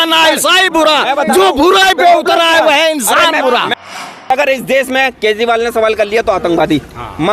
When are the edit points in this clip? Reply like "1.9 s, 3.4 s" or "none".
3.9 s